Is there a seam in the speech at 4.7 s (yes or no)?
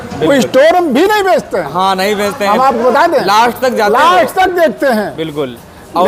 no